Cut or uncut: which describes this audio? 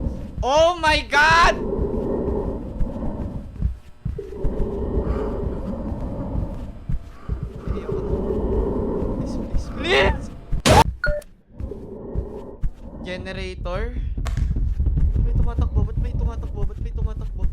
cut